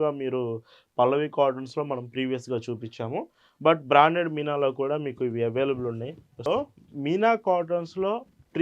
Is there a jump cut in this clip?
yes; 1 cut; at 6.5 s

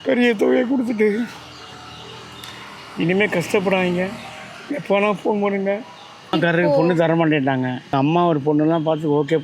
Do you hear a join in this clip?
yes; 2 cuts; at 6.3 s, 7.9 s

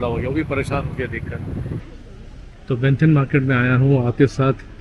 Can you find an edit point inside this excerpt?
yes; 1 cut; at 1.8 s

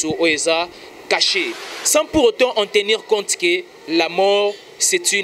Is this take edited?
yes; 1 cut; at 1.5 s

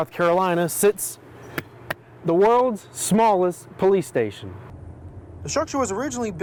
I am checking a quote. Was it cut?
no; 0 cuts

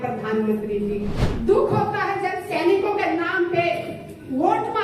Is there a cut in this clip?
yes; 1 cut; at 1.2 s

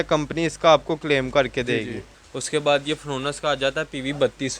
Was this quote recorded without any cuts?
no; 1 cut; at 2.0 s

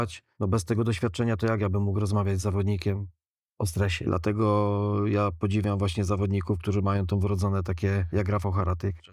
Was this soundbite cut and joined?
yes; 1 cut; at 4.0 s

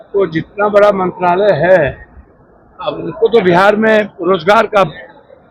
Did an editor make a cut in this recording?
no; 0 cuts

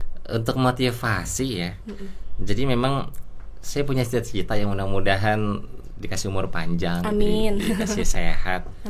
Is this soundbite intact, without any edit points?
yes; 0 cuts

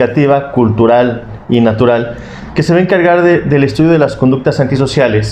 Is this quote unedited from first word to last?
yes; 0 cuts

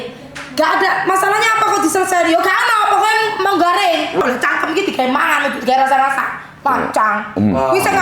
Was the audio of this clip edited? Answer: yes; 1 cut; at 4.2 s

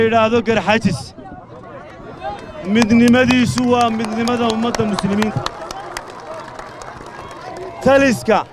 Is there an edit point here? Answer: no; 0 cuts

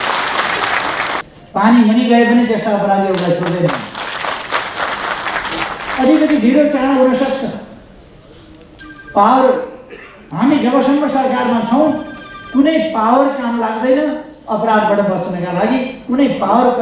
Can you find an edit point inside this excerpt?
yes; 1 cut; at 1.2 s

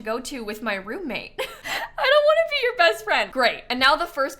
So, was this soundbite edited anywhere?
yes; 1 cut; at 3.3 s

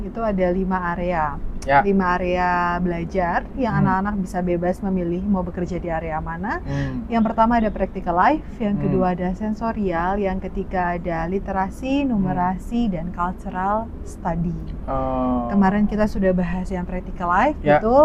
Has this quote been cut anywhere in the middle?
no; 0 cuts

